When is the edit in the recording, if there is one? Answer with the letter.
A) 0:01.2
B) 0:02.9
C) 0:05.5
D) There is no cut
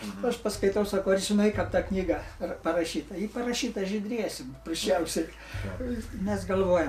D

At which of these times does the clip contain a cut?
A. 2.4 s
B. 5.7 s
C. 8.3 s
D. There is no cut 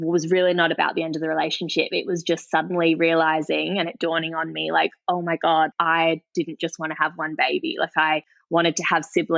B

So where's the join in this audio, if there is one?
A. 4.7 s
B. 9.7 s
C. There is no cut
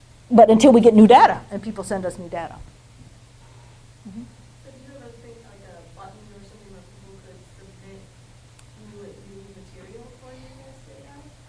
A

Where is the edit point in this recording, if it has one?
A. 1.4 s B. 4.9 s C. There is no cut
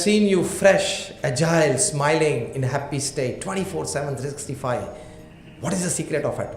B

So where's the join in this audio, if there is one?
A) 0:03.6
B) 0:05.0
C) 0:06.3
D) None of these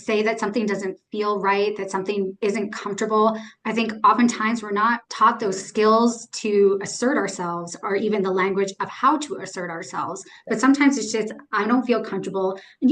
B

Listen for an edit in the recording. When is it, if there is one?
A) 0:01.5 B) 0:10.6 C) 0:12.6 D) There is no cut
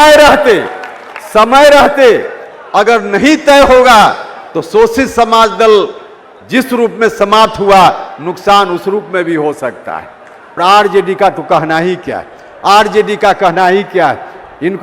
B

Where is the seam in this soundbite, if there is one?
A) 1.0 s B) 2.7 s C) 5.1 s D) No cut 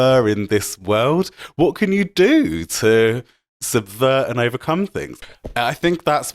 C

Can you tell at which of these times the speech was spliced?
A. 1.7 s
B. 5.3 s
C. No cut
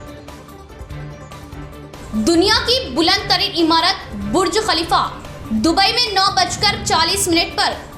A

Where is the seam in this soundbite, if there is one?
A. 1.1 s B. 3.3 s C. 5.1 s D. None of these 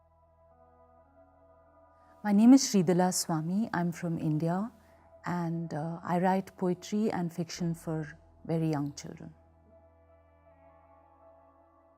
A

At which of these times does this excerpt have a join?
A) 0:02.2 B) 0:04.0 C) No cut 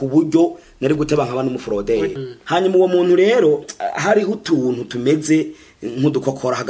A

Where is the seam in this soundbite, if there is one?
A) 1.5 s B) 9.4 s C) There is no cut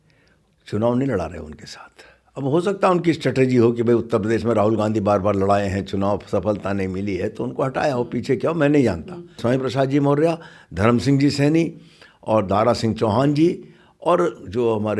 B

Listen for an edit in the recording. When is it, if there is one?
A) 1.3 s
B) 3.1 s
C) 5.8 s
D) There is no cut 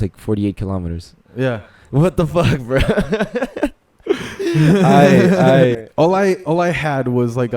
C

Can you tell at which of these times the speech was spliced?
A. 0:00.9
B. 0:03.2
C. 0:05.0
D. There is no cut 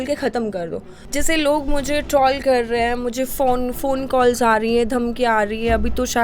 A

